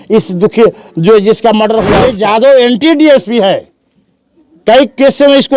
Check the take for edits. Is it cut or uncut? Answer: cut